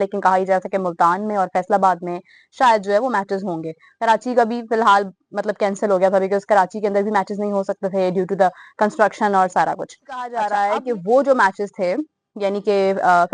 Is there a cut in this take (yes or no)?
yes